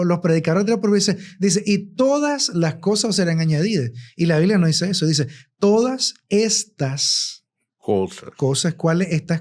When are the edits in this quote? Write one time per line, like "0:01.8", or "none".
none